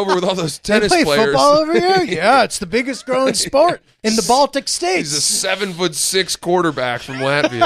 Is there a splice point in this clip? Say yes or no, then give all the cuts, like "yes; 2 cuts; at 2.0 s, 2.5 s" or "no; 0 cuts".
no; 0 cuts